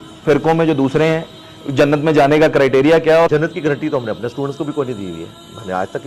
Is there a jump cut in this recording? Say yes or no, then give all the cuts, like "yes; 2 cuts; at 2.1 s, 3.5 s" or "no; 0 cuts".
yes; 1 cut; at 3.3 s